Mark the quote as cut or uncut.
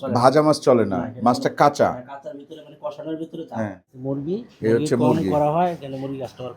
cut